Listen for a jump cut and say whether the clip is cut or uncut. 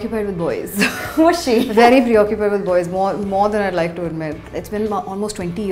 cut